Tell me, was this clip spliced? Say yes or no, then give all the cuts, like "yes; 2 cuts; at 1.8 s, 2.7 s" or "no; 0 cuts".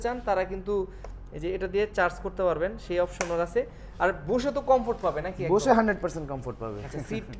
no; 0 cuts